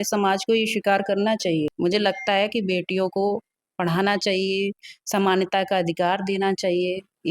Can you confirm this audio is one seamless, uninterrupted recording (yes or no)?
no